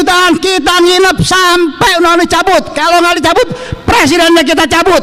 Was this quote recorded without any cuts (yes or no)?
yes